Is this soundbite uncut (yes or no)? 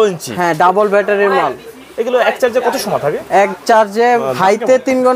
yes